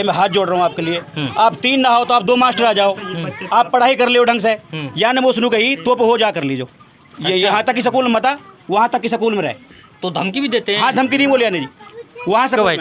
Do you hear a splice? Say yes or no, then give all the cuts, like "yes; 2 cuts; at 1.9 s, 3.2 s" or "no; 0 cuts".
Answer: no; 0 cuts